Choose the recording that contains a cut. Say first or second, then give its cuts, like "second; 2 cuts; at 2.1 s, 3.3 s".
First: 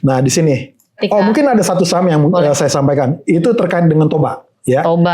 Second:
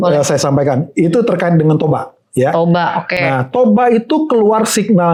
first; 1 cut; at 1.0 s